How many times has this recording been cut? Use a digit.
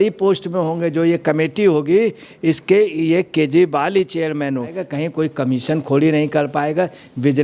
1